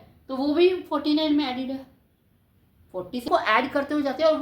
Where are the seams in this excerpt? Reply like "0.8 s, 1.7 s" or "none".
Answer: 3.3 s

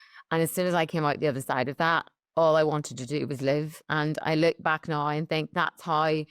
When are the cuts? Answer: none

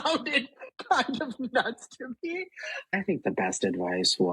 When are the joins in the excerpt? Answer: 2.9 s

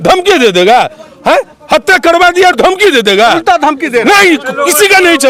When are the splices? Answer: none

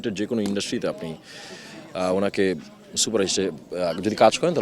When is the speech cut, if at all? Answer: none

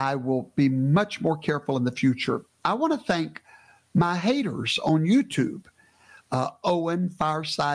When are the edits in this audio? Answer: none

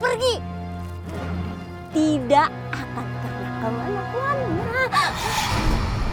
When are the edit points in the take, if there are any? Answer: none

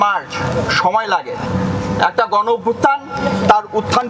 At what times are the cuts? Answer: 1.4 s

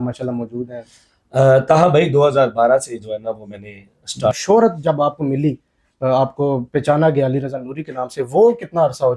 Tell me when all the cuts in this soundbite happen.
4.3 s

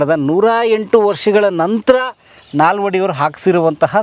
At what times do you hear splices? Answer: none

